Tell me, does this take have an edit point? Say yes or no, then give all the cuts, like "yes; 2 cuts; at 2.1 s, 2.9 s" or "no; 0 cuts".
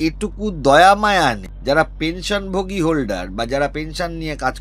yes; 1 cut; at 1.5 s